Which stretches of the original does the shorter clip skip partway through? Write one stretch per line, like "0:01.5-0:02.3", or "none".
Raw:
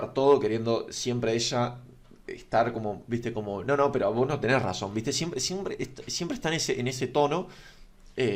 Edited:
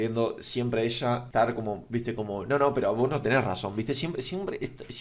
0:01.8-0:02.4